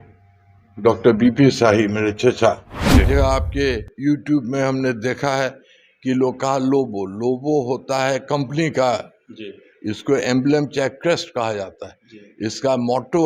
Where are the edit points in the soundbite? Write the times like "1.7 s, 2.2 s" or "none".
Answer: 3.0 s